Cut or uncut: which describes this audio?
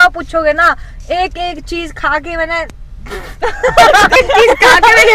uncut